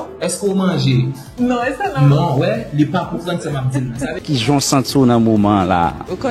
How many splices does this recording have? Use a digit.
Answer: 1